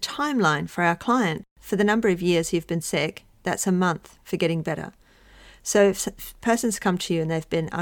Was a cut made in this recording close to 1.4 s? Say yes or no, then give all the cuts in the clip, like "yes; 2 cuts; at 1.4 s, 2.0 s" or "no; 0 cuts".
yes; 1 cut; at 1.4 s